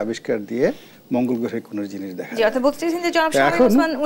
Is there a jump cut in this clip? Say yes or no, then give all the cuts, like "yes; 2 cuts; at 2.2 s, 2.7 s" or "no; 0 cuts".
no; 0 cuts